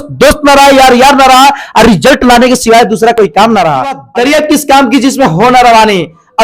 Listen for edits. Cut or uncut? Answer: cut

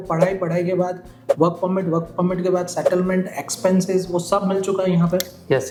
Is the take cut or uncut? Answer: uncut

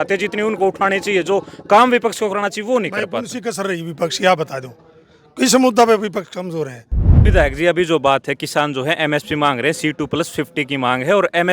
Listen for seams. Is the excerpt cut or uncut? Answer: cut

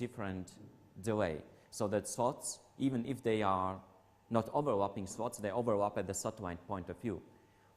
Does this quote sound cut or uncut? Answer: cut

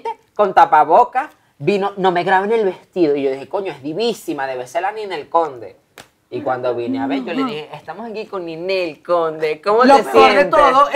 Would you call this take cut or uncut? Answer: uncut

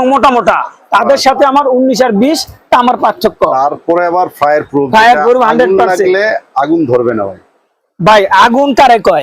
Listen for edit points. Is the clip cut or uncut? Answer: uncut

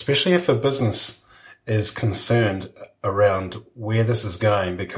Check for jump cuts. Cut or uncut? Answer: uncut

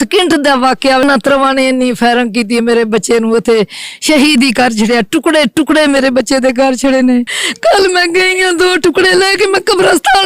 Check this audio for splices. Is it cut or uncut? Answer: cut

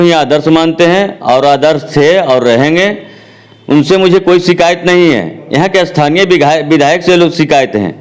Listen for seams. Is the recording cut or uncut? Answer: uncut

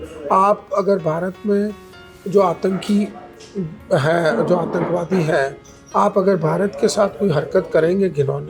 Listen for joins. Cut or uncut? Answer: uncut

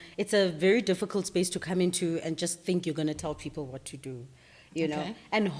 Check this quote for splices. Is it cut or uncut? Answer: uncut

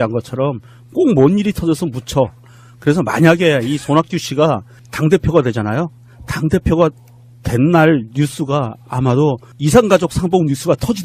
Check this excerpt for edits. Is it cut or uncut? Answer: cut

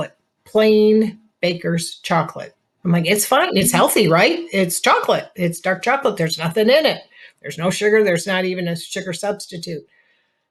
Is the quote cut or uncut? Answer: uncut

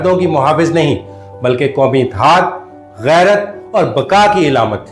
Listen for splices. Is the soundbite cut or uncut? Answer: uncut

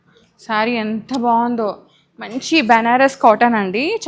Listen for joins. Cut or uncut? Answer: uncut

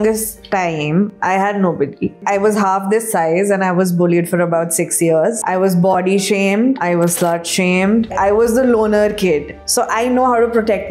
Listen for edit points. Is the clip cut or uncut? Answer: cut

